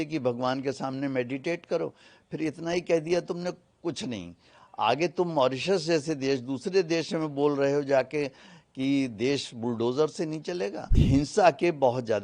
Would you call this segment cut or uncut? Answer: cut